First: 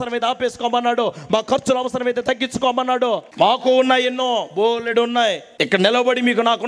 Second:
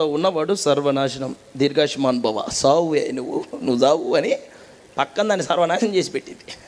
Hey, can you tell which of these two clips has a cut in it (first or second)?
first